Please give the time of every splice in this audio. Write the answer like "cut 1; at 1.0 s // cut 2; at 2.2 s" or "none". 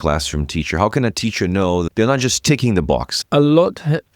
cut 1; at 1.9 s // cut 2; at 3.2 s